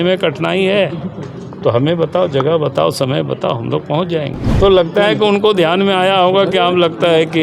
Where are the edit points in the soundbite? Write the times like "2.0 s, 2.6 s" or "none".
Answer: none